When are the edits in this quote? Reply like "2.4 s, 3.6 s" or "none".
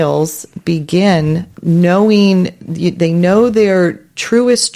1.5 s